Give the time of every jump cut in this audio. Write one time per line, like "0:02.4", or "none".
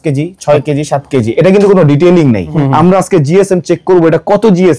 0:02.5